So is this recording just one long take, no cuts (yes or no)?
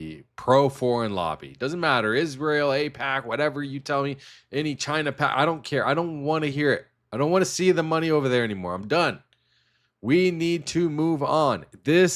yes